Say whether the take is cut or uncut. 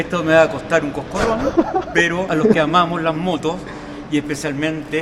cut